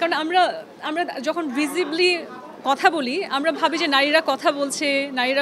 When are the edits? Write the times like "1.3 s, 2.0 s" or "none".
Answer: none